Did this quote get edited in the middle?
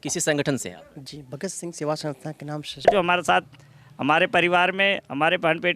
yes; 1 cut; at 2.9 s

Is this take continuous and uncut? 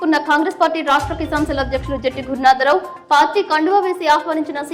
yes; 0 cuts

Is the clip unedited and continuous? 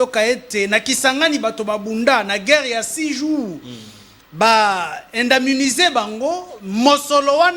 yes; 0 cuts

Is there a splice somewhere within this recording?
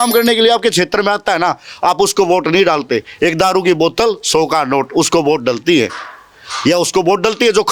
no; 0 cuts

